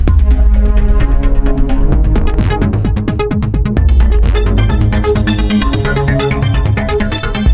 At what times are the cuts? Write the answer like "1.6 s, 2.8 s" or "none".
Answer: none